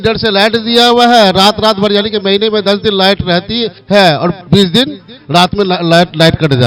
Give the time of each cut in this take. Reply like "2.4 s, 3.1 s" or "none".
3.7 s, 4.4 s